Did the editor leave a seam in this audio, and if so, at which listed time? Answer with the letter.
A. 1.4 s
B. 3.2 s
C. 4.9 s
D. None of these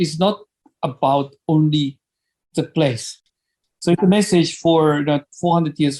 B